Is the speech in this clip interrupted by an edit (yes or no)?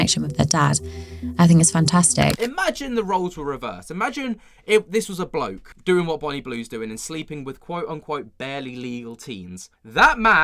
yes